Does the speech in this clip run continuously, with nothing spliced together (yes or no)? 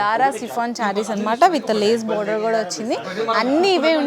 yes